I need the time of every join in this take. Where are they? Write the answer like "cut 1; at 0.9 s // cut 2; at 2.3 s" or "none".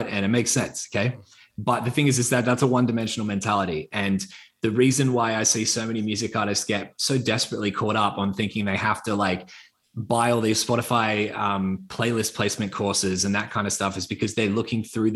none